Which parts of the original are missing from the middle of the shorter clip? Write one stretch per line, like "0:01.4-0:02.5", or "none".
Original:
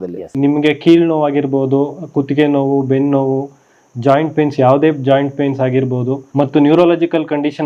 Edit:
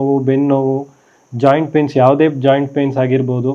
none